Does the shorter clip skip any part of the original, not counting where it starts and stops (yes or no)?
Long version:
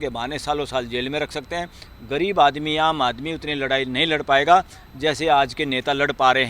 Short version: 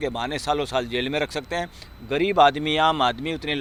no